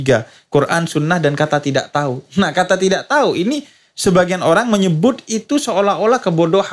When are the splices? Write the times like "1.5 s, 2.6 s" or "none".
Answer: none

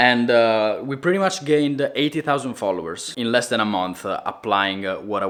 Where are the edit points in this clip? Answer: none

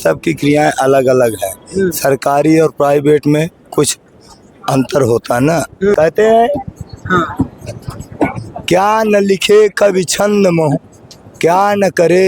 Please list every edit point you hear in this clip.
5.9 s

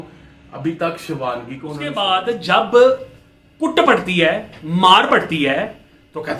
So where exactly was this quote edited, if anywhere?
2.0 s

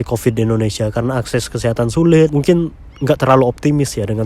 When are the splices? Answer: 2.3 s

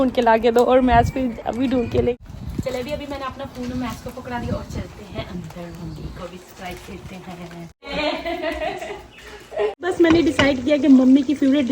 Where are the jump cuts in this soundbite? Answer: 2.2 s, 7.9 s, 9.8 s

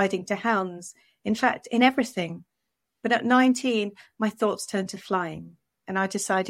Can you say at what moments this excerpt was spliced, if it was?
none

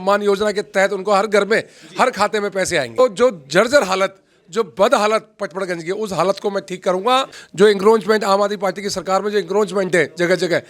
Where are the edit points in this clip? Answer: 3.0 s, 7.4 s

